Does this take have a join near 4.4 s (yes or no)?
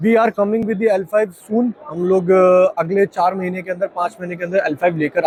no